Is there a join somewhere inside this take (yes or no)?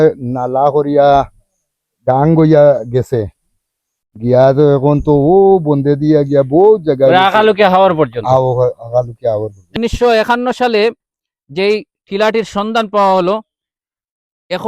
yes